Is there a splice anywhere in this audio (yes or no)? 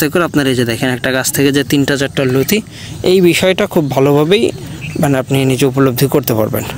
no